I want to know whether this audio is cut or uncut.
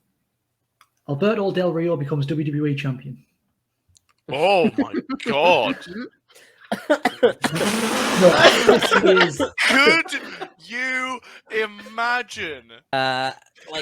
cut